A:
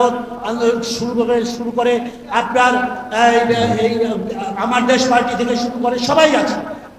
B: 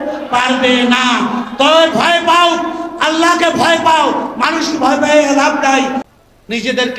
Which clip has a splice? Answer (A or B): B